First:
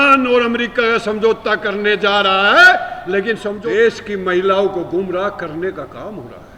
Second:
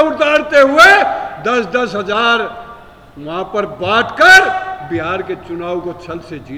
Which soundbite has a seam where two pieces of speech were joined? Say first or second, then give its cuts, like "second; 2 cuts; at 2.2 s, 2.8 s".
first; 1 cut; at 3.5 s